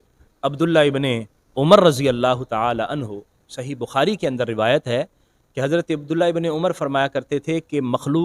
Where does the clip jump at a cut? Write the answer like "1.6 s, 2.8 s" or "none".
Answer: none